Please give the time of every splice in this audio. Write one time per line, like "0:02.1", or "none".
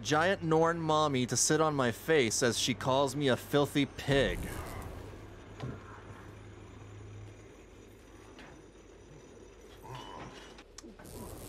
none